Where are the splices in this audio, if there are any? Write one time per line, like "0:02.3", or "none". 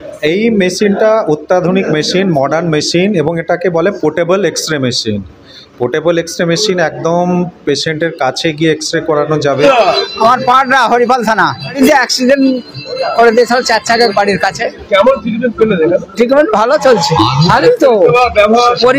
0:09.7
0:11.7
0:17.4